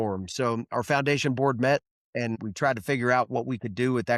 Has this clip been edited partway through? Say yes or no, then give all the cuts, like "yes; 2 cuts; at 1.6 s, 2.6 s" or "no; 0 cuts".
yes; 1 cut; at 2.4 s